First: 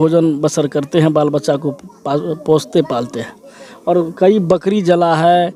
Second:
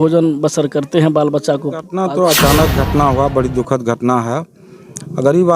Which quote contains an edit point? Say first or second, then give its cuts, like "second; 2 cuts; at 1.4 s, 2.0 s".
second; 1 cut; at 1.9 s